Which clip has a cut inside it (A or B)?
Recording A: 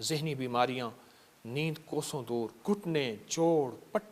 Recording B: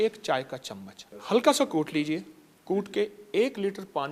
A